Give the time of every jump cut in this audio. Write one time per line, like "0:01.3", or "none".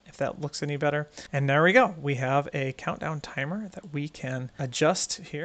0:01.2
0:04.5